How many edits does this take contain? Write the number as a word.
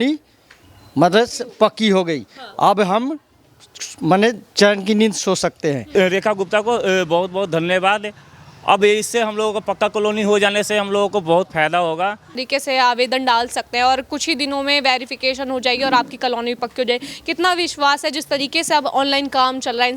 two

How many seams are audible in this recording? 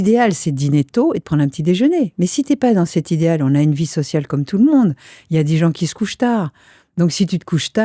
zero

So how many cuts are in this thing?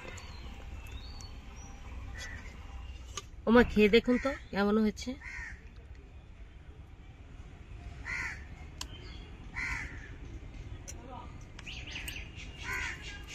zero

